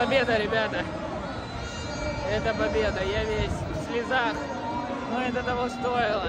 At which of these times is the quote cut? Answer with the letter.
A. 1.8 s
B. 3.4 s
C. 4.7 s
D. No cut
D